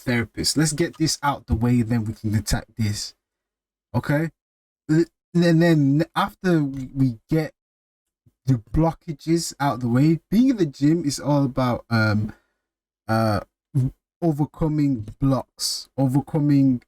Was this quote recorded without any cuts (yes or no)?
yes